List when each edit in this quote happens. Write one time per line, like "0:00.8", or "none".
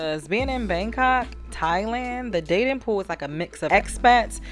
none